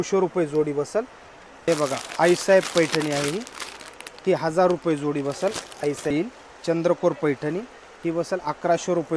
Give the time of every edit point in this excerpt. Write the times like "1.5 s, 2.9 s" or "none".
1.7 s, 6.1 s